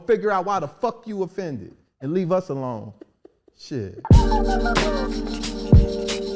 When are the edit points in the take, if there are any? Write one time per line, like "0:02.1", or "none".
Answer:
0:04.0